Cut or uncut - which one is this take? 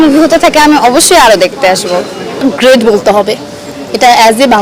cut